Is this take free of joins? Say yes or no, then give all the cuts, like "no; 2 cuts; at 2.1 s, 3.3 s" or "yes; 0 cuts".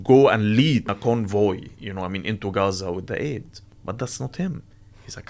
no; 2 cuts; at 0.9 s, 3.8 s